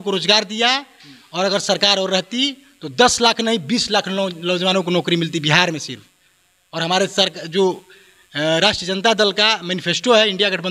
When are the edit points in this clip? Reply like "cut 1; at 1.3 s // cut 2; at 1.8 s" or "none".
none